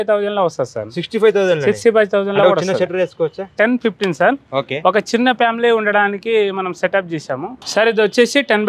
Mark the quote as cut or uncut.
cut